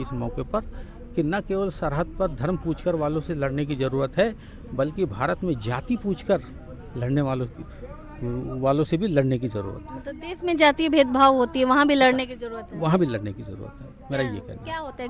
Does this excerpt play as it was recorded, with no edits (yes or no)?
yes